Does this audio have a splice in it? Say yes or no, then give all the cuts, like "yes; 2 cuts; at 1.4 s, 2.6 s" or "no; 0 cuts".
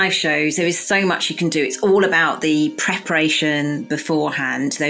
no; 0 cuts